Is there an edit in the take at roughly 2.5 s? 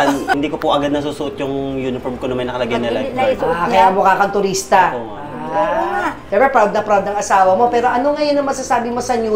no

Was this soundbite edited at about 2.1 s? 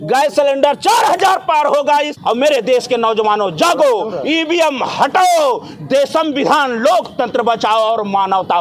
yes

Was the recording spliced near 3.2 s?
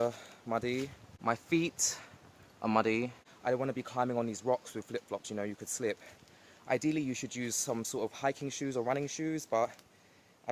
yes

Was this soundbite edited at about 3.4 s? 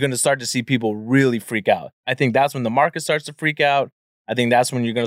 no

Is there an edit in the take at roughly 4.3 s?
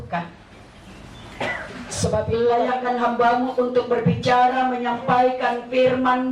no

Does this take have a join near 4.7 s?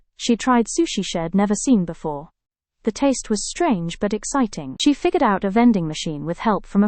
yes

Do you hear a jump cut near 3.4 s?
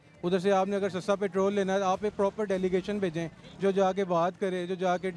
no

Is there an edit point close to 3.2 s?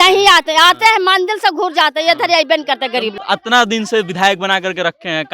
yes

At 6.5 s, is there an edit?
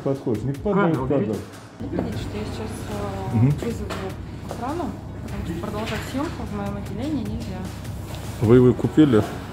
no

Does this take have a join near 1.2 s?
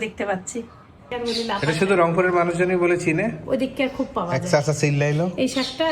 yes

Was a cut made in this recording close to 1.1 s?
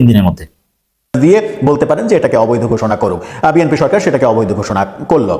yes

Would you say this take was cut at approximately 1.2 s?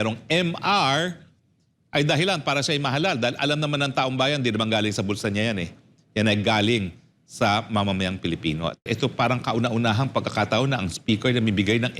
no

